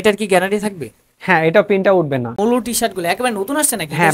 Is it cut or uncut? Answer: cut